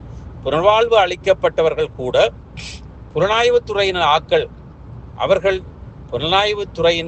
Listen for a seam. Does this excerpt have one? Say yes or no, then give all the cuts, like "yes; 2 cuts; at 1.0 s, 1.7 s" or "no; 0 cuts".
no; 0 cuts